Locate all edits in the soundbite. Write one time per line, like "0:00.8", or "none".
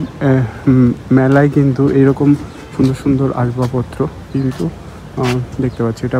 none